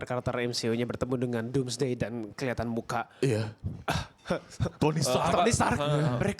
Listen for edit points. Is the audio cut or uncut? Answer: uncut